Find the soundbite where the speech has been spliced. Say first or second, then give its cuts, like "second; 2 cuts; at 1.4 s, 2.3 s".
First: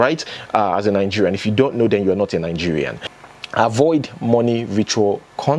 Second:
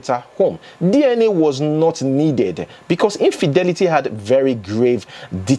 first; 1 cut; at 3.0 s